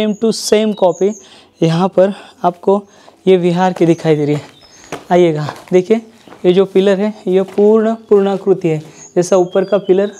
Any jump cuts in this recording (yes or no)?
no